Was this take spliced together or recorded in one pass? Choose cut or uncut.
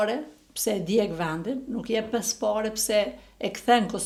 uncut